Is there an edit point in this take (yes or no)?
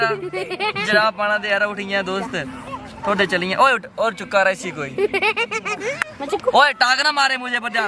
no